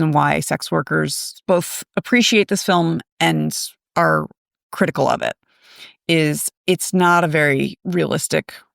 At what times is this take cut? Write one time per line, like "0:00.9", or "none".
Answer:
0:01.3
0:07.8